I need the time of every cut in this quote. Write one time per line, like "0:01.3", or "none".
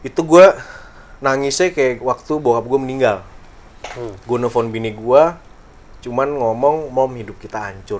none